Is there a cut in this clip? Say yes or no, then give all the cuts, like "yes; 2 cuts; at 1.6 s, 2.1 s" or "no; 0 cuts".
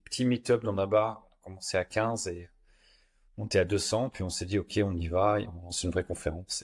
no; 0 cuts